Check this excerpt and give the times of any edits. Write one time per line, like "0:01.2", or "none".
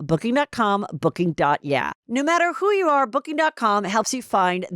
0:02.0